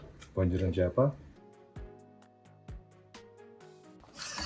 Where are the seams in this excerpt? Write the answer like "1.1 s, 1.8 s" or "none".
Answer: 1.4 s